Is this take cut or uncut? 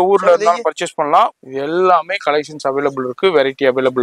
cut